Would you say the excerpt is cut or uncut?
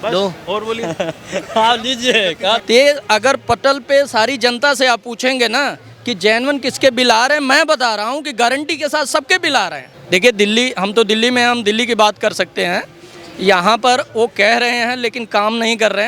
cut